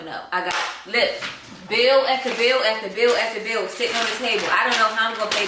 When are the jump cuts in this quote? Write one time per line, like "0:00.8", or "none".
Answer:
none